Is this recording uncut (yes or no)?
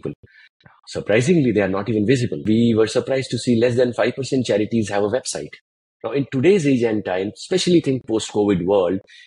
no